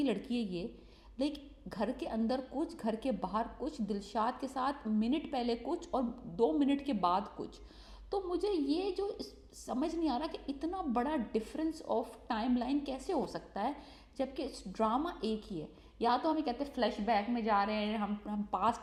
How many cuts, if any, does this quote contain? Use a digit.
0